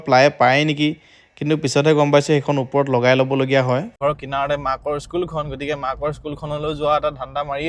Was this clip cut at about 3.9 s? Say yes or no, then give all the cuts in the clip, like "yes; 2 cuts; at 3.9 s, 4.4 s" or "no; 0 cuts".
yes; 1 cut; at 3.9 s